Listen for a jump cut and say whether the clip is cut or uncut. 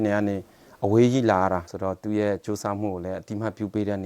cut